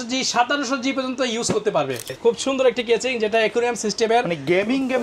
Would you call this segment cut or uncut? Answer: cut